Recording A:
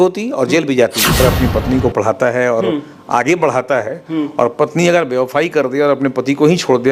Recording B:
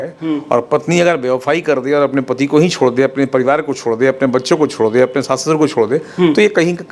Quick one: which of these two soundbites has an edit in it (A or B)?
A